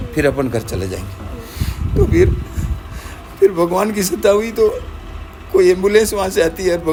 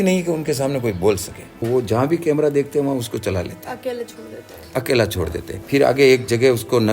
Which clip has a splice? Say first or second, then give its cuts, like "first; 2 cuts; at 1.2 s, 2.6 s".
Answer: second; 2 cuts; at 1.6 s, 5.5 s